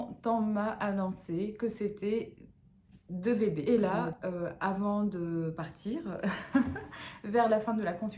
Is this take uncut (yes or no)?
no